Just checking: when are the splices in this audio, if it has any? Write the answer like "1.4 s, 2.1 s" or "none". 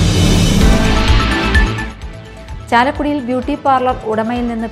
0.9 s